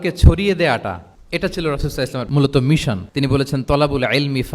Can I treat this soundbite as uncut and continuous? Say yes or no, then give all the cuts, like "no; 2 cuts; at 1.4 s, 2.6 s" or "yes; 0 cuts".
no; 3 cuts; at 1.1 s, 2.3 s, 3.0 s